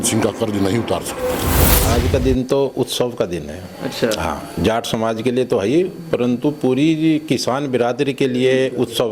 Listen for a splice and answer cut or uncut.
cut